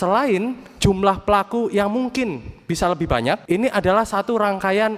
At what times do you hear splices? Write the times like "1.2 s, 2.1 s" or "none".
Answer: 3.4 s